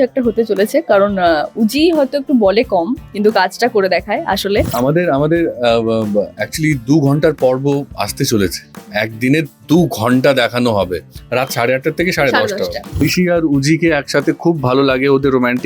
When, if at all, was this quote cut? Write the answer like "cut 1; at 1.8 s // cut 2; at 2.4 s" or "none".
cut 1; at 4.7 s // cut 2; at 13.0 s